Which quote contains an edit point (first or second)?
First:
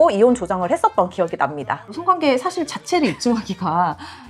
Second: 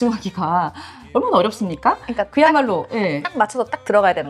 first